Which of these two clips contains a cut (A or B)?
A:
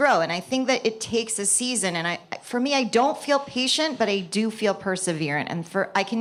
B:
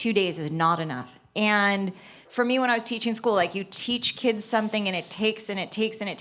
B